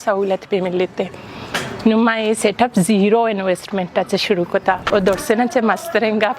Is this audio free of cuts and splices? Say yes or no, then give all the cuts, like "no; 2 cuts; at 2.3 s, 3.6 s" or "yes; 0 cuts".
no; 1 cut; at 4.8 s